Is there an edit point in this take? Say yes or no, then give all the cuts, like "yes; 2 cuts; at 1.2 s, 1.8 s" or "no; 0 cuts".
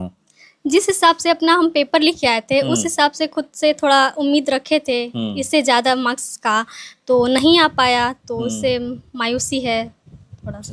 no; 0 cuts